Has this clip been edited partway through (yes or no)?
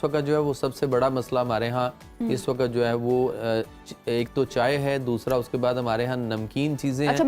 no